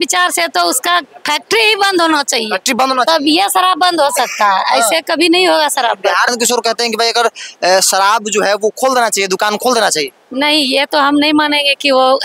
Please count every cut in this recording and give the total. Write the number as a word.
one